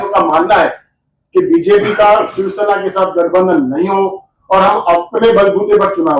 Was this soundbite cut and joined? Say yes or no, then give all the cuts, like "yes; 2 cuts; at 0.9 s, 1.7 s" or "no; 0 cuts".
no; 0 cuts